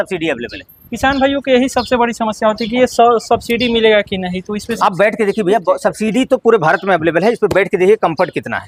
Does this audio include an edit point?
no; 0 cuts

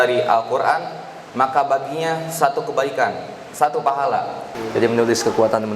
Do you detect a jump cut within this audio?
yes; 1 cut; at 4.5 s

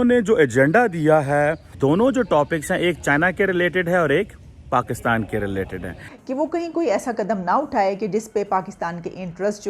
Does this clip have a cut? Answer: yes; 1 cut; at 6.1 s

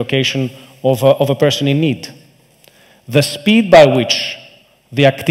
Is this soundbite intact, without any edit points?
yes; 0 cuts

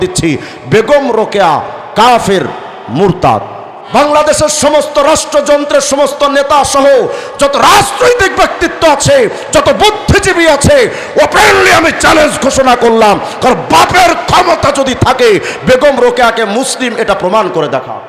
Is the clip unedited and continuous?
no; 1 cut; at 3.8 s

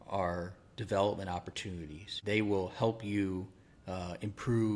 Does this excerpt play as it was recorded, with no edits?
no; 1 cut; at 2.1 s

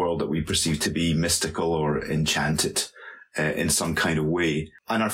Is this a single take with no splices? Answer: yes; 0 cuts

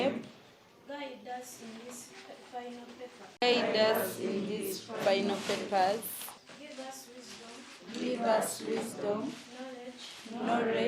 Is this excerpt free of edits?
no; 1 cut; at 6.3 s

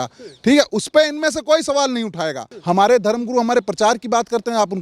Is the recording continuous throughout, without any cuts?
no; 1 cut; at 2.5 s

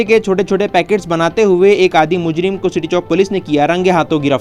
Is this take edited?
no; 0 cuts

